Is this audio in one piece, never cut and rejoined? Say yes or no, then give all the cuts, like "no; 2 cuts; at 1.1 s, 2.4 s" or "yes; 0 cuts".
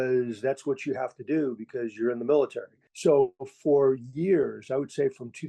no; 1 cut; at 3.3 s